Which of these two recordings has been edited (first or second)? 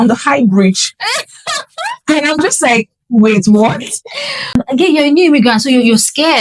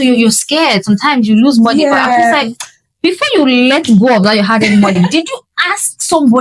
first